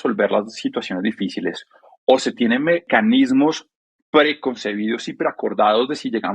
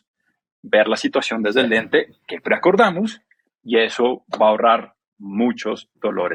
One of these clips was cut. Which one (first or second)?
first